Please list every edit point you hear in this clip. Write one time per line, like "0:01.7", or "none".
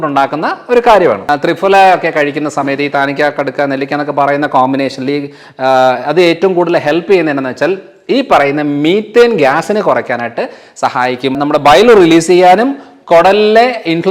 0:01.2
0:11.4

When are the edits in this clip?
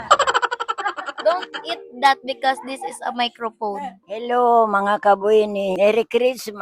0:04.0
0:05.8

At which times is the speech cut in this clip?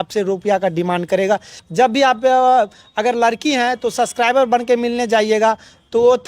0:01.6

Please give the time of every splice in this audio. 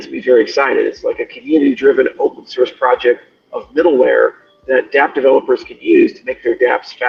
none

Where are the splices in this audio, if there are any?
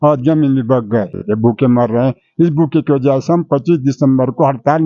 0:01.2

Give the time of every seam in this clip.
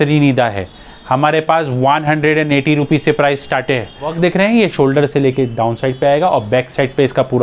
0:04.1

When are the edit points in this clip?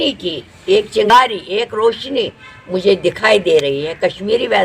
0:01.1

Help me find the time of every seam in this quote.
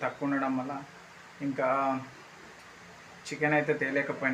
none

